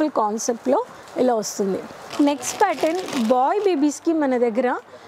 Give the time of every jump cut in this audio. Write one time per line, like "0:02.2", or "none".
none